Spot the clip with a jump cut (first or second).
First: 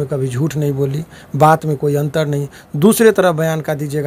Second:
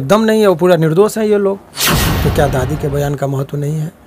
second